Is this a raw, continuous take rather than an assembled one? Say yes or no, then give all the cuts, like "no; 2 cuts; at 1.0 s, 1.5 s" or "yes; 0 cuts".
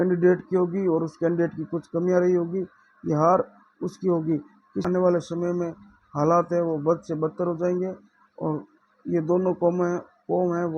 no; 1 cut; at 4.8 s